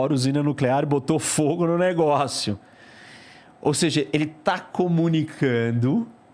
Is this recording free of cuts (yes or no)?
yes